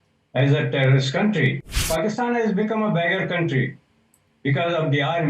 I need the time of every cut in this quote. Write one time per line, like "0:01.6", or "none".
0:01.9